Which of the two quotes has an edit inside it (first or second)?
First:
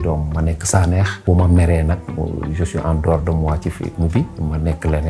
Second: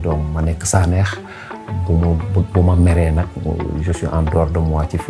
first